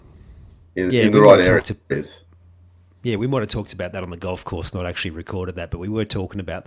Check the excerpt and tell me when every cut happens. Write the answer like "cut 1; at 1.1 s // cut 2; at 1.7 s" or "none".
none